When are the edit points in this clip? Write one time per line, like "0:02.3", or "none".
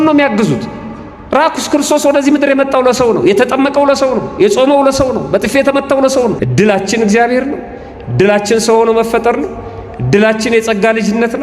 0:06.4